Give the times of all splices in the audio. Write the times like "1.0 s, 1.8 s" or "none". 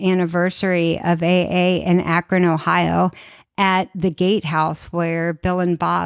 none